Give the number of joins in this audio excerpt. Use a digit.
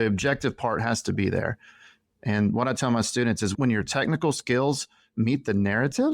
1